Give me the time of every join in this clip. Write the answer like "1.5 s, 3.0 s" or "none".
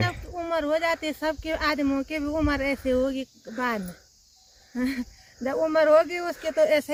none